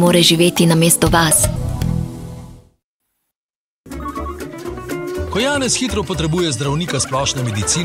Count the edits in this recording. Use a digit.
1